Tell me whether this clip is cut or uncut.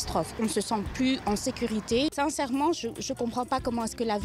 cut